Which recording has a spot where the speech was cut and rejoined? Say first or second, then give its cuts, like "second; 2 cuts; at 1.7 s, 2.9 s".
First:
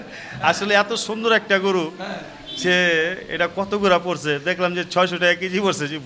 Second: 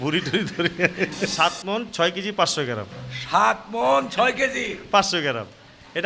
second; 1 cut; at 1.3 s